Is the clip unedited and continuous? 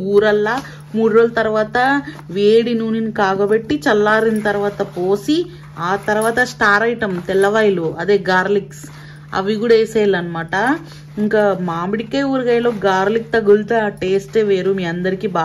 yes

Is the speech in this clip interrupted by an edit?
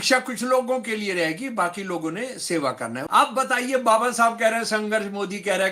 yes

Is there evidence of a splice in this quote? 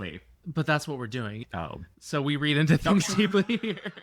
yes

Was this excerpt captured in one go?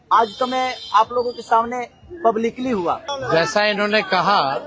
no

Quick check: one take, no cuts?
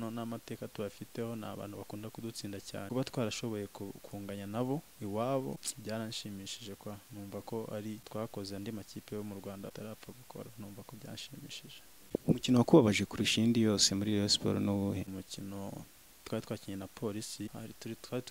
no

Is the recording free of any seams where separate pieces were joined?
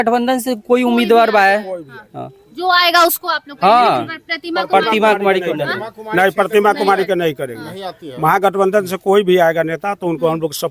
yes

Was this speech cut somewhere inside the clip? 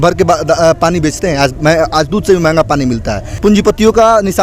yes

